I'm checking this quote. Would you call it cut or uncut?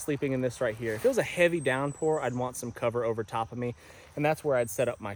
uncut